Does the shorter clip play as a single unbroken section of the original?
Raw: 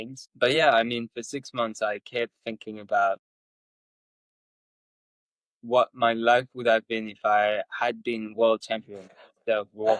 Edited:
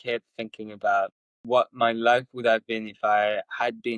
no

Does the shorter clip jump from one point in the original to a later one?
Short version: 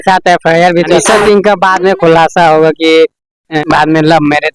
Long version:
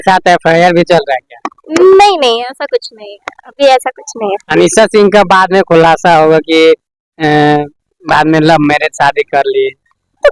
yes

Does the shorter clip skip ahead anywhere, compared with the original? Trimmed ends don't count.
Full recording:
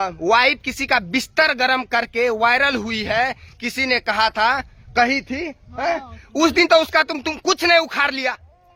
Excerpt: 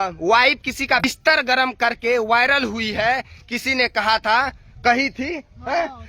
yes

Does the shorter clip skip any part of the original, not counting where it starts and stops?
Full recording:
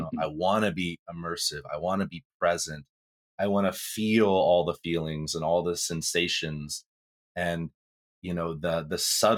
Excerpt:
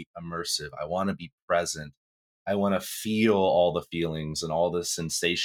no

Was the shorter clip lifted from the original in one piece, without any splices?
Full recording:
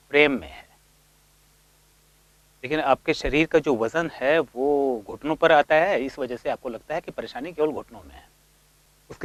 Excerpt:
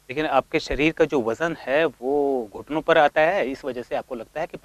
yes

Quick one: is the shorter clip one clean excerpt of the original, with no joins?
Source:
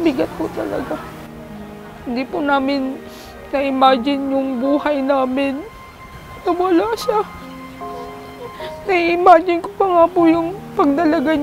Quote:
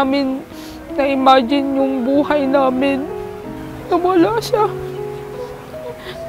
yes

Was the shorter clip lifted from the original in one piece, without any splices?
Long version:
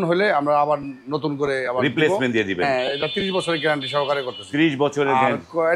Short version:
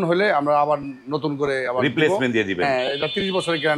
yes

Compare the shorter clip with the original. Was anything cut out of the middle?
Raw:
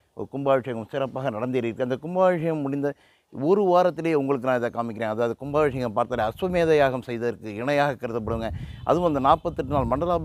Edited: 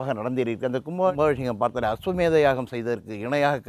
yes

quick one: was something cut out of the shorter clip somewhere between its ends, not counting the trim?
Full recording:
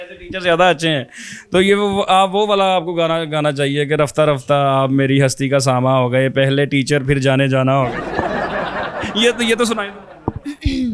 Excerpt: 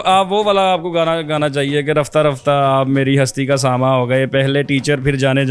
no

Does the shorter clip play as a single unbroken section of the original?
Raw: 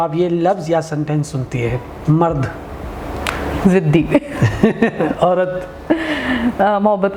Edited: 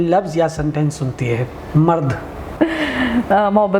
no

